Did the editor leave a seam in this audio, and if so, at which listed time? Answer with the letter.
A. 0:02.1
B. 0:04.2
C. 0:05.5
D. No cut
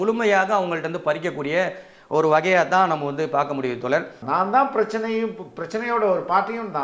B